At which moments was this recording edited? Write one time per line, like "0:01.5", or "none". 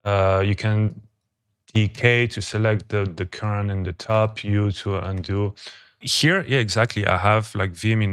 0:06.0